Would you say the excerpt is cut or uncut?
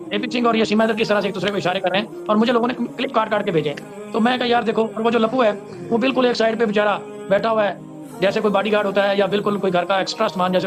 uncut